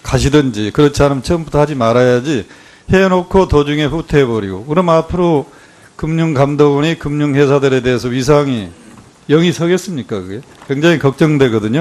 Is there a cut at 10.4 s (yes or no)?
no